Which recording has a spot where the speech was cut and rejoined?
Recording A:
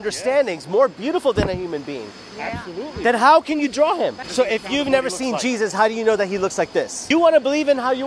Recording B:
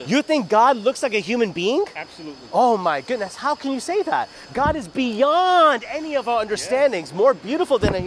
A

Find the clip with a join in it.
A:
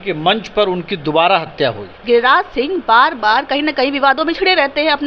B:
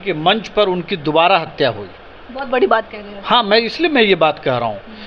A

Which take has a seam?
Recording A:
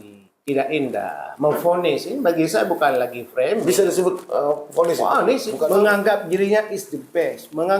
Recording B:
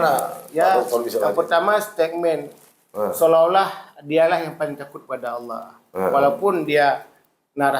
A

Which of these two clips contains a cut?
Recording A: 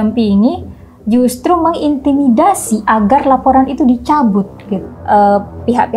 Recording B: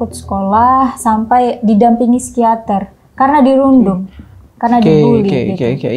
A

